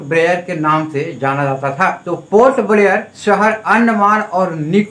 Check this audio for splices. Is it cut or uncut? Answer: cut